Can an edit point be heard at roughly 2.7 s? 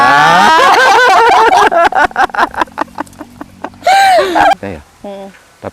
no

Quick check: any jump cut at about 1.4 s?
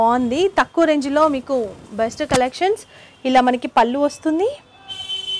no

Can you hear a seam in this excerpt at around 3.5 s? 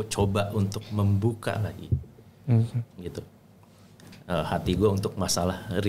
no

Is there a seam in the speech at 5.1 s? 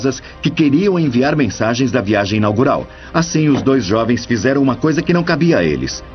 yes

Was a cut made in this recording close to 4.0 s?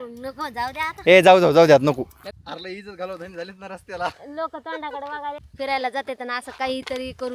no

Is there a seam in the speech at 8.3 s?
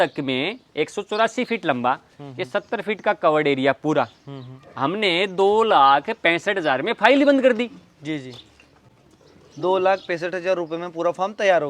no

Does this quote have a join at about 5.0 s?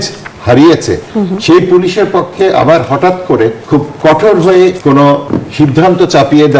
yes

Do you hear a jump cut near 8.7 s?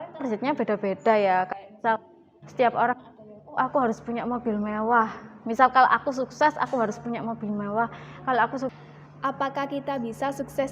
yes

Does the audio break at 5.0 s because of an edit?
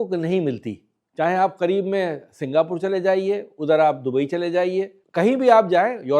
yes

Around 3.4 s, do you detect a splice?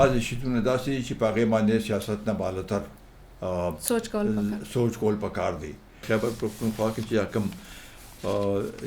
no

